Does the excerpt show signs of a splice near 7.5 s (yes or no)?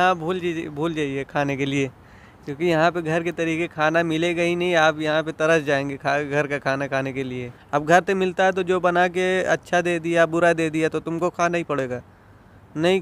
yes